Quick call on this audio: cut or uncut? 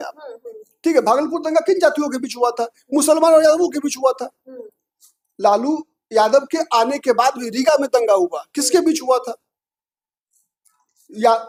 uncut